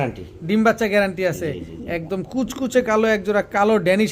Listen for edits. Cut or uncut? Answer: uncut